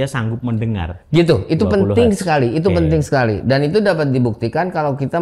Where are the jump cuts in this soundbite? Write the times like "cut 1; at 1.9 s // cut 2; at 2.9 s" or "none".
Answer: cut 1; at 1.1 s